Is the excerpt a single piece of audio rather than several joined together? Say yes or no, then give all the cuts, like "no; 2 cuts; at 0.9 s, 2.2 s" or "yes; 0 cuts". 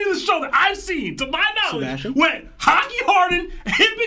yes; 0 cuts